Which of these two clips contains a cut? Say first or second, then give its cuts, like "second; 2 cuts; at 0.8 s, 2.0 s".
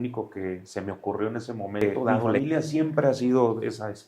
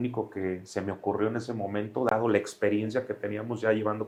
first; 1 cut; at 2.1 s